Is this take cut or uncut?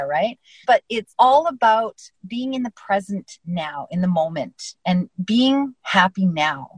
uncut